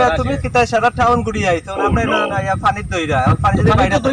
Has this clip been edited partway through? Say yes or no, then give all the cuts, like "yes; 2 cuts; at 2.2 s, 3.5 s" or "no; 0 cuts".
no; 0 cuts